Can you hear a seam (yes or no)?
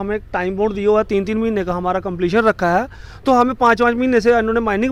no